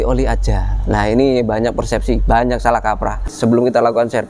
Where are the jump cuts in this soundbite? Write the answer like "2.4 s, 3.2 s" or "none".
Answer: 3.3 s